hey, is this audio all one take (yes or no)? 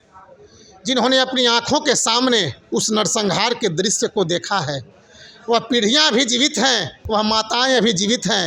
yes